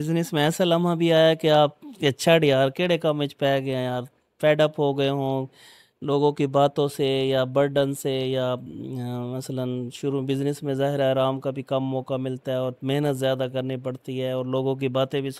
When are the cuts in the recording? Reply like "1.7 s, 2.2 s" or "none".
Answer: none